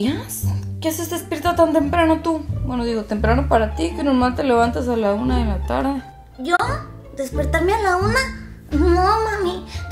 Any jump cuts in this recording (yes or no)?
no